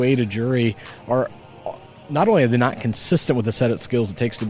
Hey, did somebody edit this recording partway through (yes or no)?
no